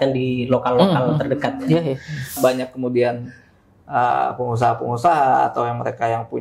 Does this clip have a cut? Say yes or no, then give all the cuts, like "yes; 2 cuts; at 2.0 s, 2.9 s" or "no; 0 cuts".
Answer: yes; 1 cut; at 2.4 s